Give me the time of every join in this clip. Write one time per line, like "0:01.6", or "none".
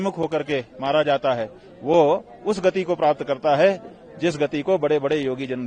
none